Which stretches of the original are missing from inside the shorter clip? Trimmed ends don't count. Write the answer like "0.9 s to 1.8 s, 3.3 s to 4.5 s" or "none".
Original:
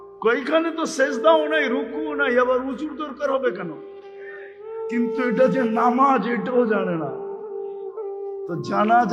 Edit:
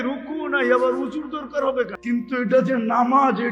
3.6 s to 4.8 s